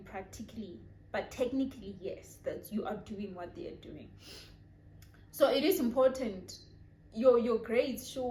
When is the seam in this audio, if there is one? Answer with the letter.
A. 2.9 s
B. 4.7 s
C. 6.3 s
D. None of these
D